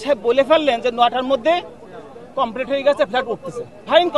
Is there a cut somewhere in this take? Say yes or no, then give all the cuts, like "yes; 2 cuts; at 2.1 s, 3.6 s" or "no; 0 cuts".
no; 0 cuts